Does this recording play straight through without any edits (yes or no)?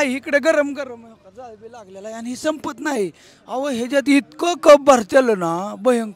yes